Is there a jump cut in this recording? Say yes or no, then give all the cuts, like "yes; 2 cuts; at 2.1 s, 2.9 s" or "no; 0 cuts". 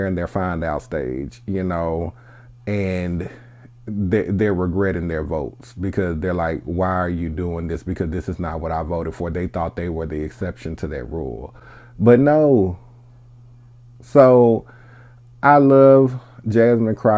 no; 0 cuts